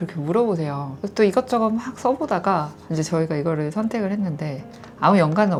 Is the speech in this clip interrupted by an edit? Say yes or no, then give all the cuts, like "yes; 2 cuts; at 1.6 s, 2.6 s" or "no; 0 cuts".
no; 0 cuts